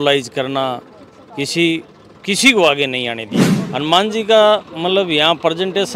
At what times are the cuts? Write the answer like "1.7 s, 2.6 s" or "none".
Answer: 3.5 s